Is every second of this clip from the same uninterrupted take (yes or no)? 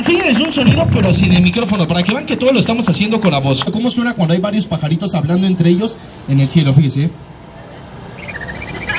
no